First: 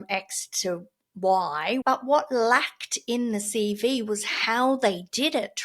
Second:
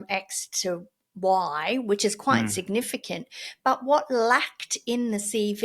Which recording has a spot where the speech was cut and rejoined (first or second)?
first